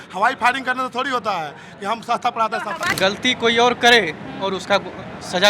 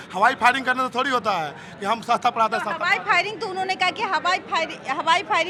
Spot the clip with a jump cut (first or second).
first